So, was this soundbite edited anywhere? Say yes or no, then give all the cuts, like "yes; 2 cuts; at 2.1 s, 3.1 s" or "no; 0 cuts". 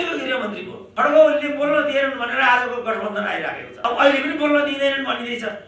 no; 0 cuts